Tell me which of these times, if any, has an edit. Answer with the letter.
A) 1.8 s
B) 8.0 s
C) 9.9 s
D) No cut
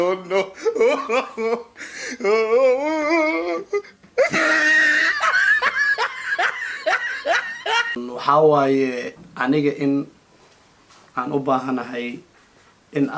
B